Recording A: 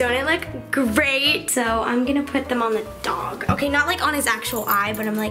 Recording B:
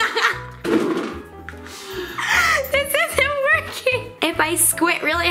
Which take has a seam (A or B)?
A